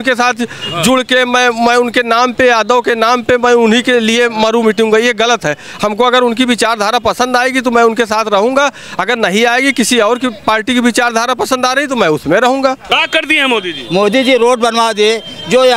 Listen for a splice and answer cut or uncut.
cut